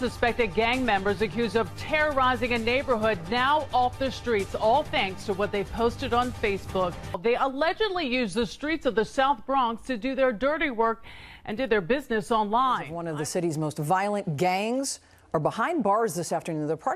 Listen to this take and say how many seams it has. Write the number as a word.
two